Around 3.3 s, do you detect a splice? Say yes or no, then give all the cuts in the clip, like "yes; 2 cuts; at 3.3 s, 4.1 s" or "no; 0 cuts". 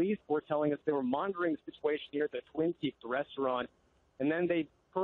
yes; 1 cut; at 3.3 s